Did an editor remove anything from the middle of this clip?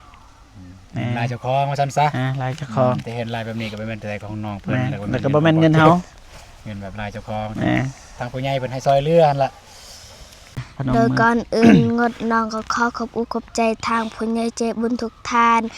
yes; 1 cut; at 10.7 s

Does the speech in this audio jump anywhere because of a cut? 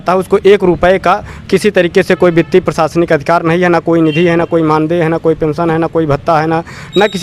no; 0 cuts

